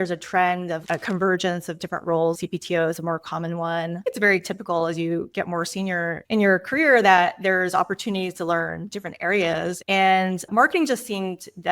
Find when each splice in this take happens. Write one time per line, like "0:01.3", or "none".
0:00.8
0:02.4
0:04.0
0:09.8